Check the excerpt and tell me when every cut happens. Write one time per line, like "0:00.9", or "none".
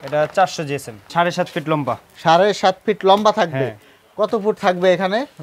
0:01.0